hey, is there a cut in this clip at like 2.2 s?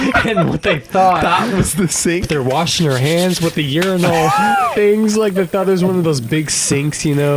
yes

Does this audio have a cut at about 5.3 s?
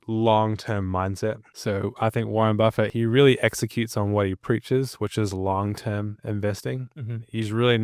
no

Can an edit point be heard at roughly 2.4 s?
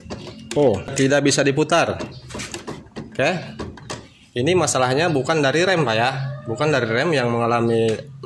no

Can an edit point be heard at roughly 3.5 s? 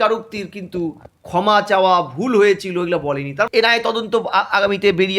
yes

